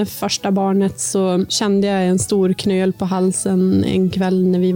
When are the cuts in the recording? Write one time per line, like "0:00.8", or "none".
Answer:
0:01.6